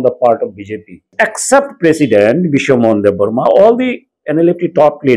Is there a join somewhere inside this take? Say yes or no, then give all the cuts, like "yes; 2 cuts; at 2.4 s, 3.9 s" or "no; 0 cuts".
yes; 1 cut; at 1.1 s